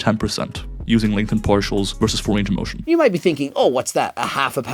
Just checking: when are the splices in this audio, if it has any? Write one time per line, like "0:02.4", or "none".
0:02.7